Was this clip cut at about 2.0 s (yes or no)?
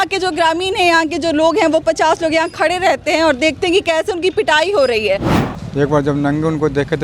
no